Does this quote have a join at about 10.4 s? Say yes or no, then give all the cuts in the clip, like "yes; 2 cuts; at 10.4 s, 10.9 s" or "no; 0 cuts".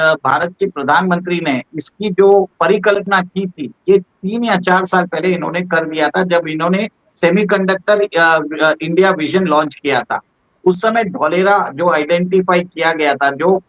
no; 0 cuts